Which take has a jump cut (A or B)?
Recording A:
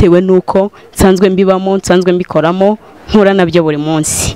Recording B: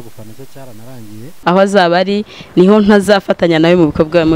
B